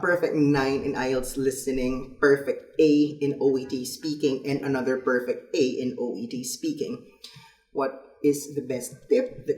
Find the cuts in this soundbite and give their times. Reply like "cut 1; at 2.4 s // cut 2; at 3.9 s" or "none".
none

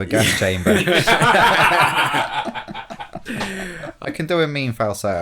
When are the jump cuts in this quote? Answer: cut 1; at 4.1 s

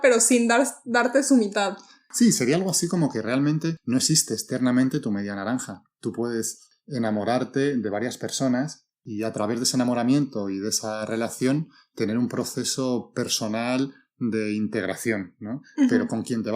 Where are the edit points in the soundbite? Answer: cut 1; at 2.0 s // cut 2; at 3.8 s

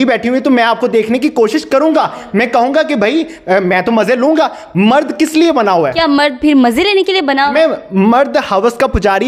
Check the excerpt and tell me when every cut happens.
none

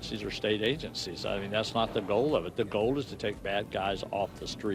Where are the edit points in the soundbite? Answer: none

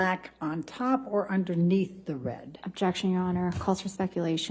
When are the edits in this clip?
none

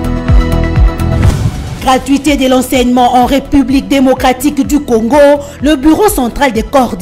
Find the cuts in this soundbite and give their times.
cut 1; at 1.2 s

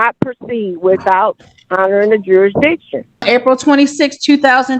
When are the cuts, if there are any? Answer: cut 1; at 3.2 s

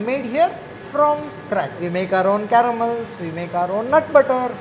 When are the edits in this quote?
cut 1; at 1.7 s

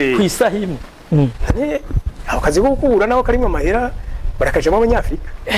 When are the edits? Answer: cut 1; at 1.0 s

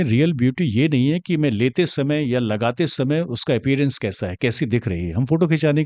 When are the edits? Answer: none

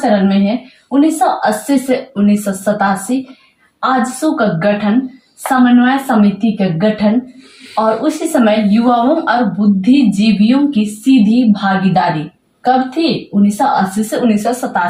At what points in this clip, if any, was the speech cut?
none

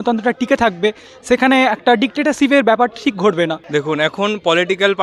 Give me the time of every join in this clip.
cut 1; at 3.6 s

